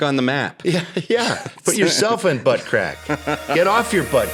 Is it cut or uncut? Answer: uncut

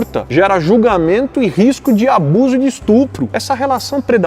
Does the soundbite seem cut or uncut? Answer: cut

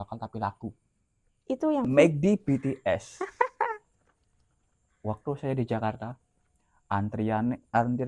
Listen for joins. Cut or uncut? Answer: cut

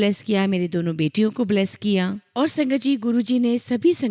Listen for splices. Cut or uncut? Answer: cut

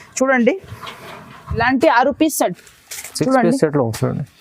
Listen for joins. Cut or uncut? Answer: cut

